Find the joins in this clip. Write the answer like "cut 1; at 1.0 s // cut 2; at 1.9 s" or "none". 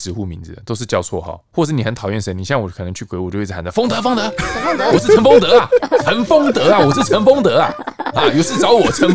cut 1; at 1.4 s